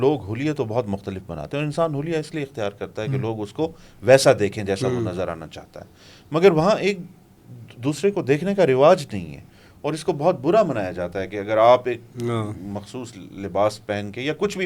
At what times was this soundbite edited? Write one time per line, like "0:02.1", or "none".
none